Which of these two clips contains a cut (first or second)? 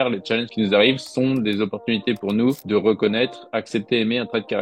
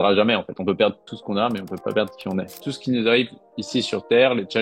second